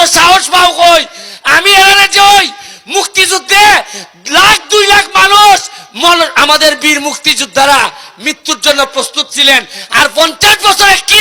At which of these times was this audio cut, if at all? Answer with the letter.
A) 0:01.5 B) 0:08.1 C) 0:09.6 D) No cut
D